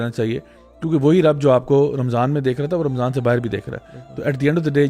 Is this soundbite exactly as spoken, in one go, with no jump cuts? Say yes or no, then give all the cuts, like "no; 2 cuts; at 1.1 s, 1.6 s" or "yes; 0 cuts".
yes; 0 cuts